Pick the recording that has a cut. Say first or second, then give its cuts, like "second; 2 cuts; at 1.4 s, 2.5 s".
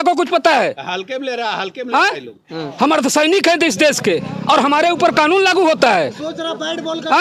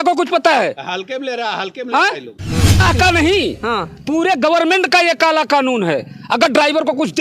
second; 1 cut; at 2.8 s